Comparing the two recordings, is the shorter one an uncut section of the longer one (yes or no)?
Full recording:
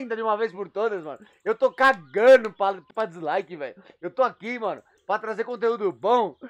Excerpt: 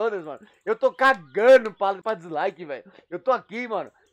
no